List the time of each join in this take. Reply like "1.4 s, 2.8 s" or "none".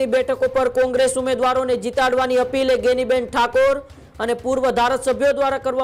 none